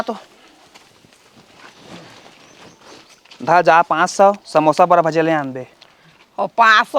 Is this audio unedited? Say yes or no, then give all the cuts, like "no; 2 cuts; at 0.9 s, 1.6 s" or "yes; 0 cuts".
yes; 0 cuts